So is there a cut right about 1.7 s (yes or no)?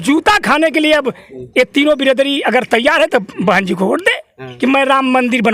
no